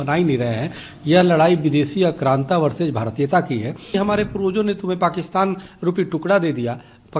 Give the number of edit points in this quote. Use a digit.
1